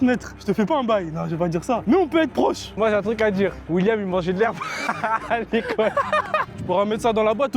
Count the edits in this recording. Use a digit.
2